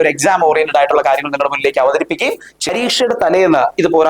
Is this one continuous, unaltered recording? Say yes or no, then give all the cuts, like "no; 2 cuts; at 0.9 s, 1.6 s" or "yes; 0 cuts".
no; 1 cut; at 2.7 s